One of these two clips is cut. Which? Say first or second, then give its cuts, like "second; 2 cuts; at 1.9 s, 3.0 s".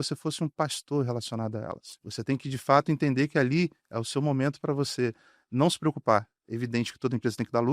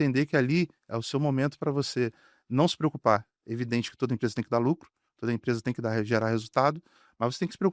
first; 1 cut; at 1.9 s